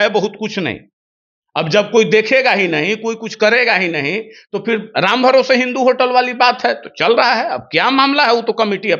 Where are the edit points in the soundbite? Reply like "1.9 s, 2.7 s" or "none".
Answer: none